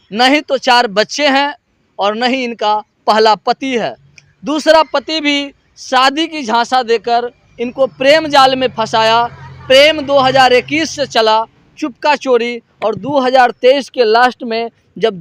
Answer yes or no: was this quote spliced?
no